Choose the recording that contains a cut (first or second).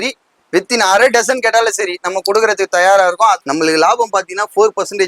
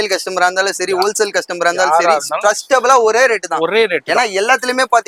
first